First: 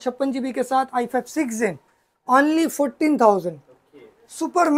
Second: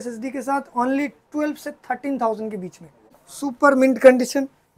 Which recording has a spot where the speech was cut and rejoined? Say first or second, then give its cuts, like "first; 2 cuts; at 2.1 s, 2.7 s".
second; 1 cut; at 3.2 s